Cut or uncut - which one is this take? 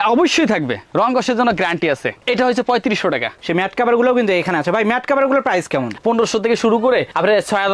cut